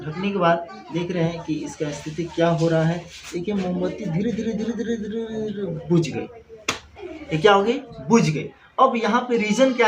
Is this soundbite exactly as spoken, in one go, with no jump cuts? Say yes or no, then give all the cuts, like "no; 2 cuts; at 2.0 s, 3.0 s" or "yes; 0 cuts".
yes; 0 cuts